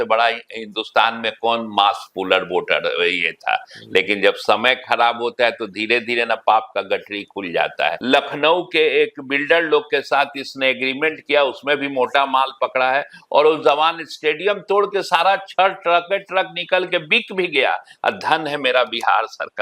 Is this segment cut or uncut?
cut